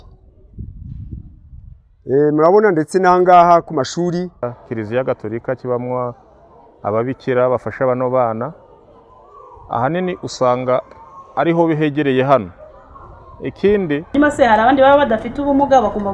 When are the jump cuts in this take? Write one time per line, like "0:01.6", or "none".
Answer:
0:04.6
0:14.1